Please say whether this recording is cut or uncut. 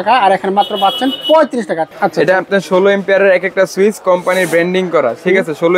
cut